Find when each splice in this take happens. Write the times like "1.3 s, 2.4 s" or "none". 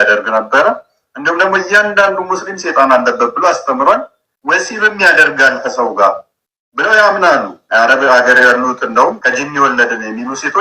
7.6 s, 9.2 s